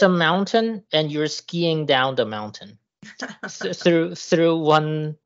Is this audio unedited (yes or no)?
yes